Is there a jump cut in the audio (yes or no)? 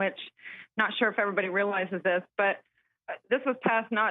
yes